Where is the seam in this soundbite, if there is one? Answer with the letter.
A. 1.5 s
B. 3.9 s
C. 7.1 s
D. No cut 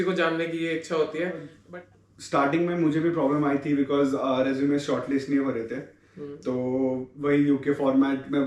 A